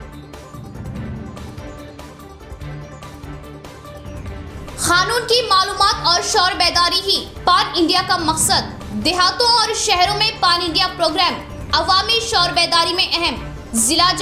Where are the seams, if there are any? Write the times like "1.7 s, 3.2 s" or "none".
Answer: 4.1 s